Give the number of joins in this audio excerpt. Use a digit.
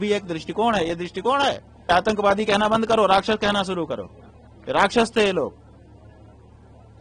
1